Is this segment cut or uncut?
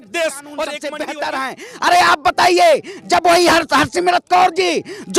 cut